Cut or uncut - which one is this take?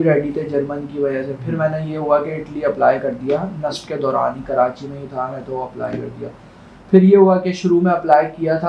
uncut